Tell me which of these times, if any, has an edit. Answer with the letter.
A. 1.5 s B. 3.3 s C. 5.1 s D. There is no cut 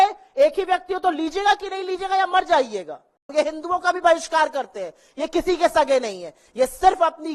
B